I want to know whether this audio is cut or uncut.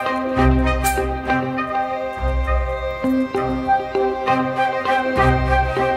cut